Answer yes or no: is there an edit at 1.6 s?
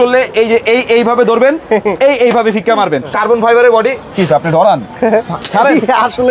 no